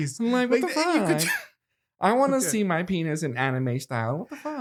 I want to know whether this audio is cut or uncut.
uncut